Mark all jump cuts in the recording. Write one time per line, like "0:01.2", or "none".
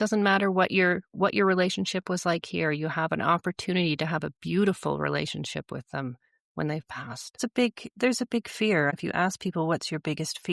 0:07.4
0:08.9